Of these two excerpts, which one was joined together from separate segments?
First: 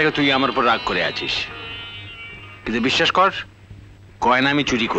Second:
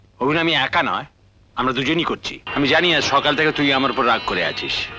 second; 1 cut; at 2.4 s

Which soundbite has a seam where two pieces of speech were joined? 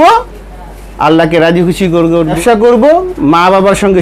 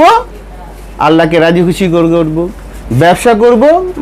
first; 1 cut; at 2.4 s

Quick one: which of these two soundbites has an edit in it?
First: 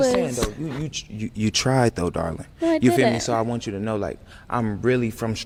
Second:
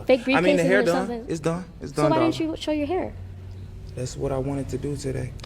second; 1 cut; at 2.1 s

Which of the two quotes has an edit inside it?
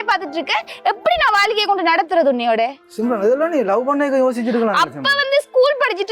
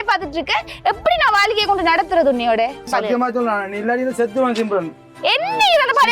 second; 1 cut; at 2.9 s

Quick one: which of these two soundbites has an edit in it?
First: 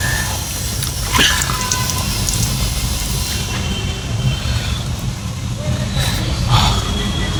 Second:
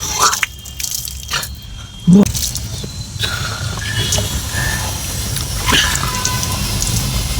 second; 1 cut; at 2.2 s

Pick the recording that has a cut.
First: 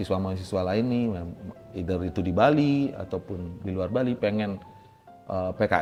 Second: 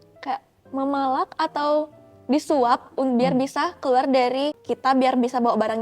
second; 1 cut; at 4.6 s

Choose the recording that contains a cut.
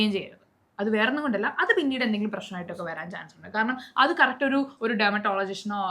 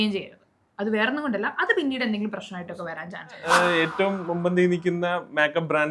second; 1 cut; at 3.4 s

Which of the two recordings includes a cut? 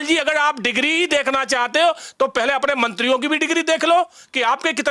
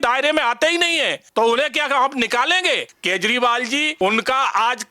second; 3 cuts; at 1.2 s, 2.9 s, 3.9 s

